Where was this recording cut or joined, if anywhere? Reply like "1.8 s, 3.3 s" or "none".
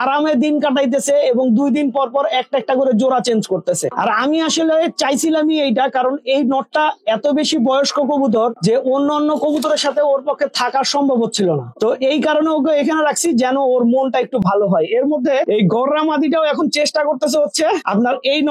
none